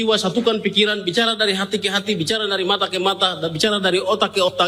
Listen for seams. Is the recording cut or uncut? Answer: uncut